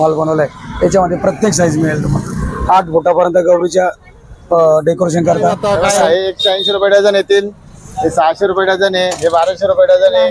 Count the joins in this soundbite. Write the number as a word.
one